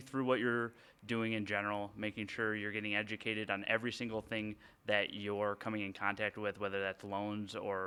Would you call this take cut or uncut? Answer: uncut